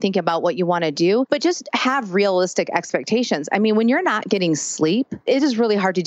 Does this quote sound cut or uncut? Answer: cut